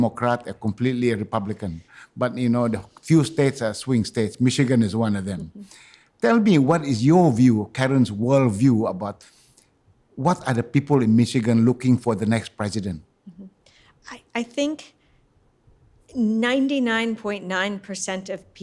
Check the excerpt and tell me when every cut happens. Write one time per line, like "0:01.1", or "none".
none